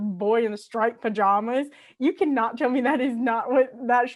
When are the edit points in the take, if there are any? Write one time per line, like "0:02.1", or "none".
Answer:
none